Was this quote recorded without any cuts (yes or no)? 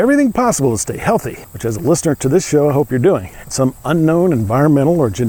no